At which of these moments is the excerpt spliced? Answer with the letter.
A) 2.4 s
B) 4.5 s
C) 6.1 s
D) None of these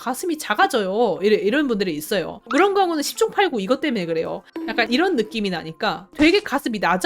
B